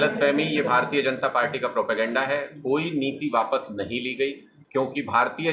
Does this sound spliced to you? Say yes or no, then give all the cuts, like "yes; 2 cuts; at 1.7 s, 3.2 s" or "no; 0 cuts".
yes; 1 cut; at 4.6 s